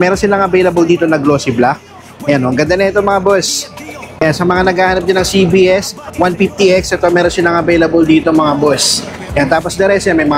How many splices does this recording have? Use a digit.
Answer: 1